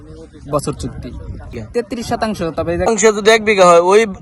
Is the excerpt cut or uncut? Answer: cut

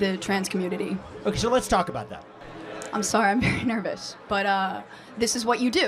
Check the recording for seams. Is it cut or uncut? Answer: cut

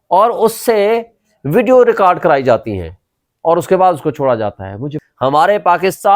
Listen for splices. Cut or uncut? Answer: cut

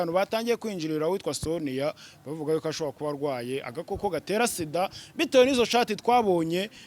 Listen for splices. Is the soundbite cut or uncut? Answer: uncut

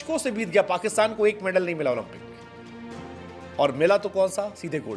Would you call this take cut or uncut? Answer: uncut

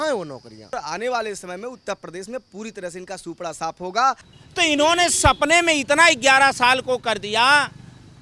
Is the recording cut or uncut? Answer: cut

